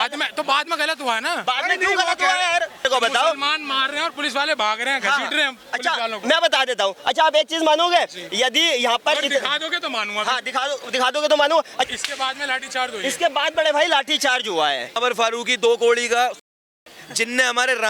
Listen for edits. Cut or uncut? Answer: cut